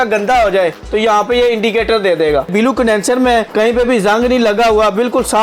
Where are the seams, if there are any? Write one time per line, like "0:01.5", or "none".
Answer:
0:02.5
0:03.5